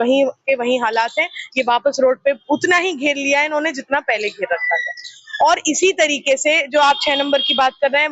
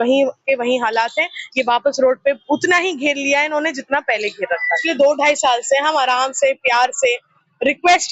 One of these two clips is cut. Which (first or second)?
second